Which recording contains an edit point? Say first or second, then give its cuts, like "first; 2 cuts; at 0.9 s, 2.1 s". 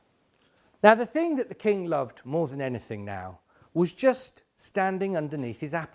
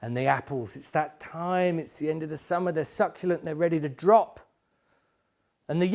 first; 1 cut; at 4.9 s